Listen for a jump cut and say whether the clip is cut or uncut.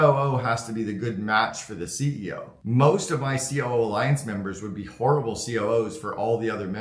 cut